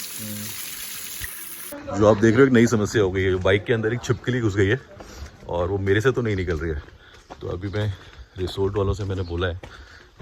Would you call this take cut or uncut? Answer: cut